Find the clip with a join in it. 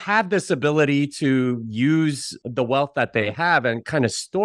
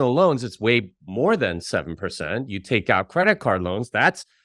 first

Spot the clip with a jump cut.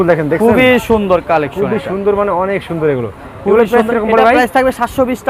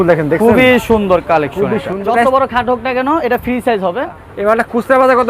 second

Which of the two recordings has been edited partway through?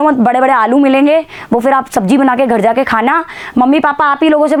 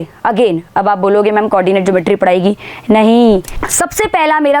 second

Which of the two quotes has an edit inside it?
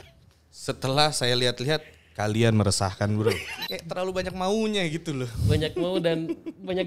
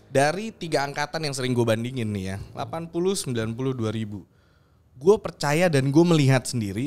first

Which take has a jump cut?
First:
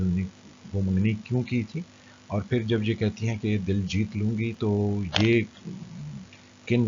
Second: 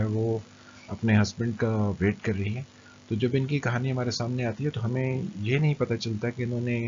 first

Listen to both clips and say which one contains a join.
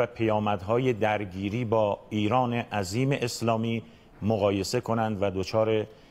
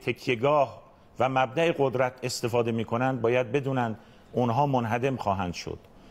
first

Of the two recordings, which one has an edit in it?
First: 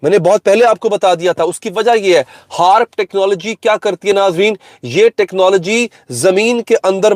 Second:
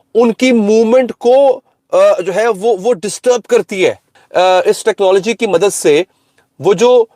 second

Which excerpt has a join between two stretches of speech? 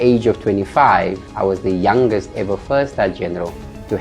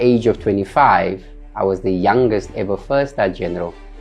first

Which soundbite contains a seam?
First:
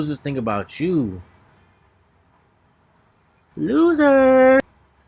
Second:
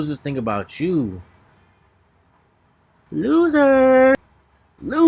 second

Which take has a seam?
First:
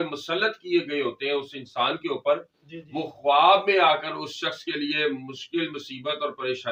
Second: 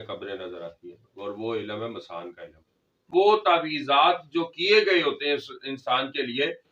second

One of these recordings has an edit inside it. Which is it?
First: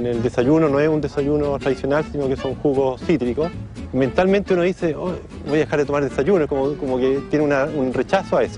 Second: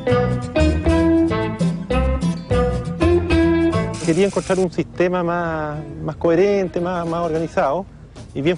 first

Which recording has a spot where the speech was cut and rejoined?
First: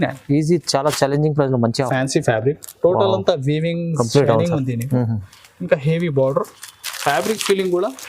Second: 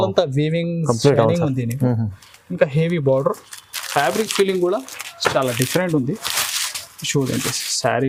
first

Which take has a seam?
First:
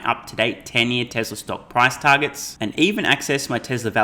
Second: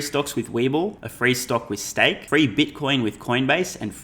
second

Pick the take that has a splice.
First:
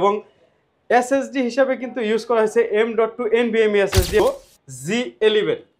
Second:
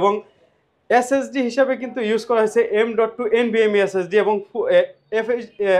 first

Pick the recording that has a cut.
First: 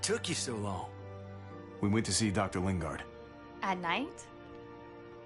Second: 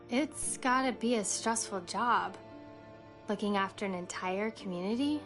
first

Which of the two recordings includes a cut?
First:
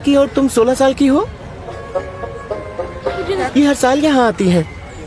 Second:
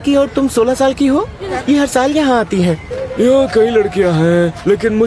second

